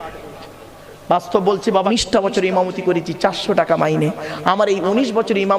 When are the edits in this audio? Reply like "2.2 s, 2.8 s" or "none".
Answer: 1.9 s